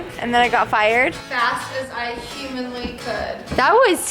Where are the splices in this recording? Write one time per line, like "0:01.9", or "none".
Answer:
0:01.1